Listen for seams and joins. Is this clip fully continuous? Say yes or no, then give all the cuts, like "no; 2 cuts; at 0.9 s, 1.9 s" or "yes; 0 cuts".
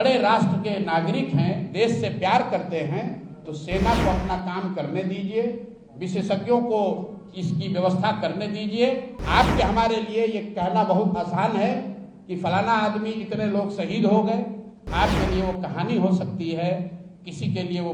no; 1 cut; at 9.1 s